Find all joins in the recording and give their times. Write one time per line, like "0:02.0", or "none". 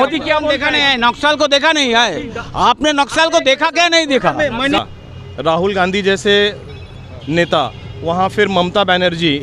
0:04.8

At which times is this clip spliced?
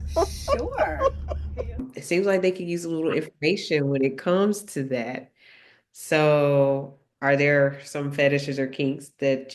0:01.8

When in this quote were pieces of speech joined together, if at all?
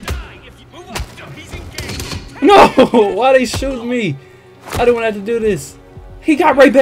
none

